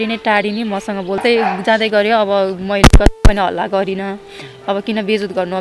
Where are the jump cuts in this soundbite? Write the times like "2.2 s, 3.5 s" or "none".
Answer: 1.2 s